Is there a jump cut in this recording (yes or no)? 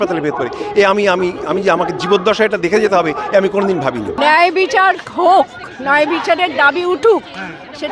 yes